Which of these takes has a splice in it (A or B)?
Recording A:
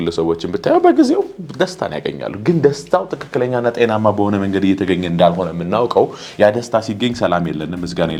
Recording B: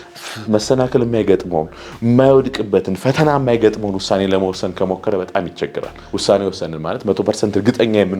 B